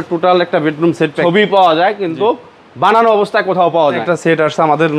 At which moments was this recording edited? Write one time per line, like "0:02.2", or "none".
0:01.2
0:04.0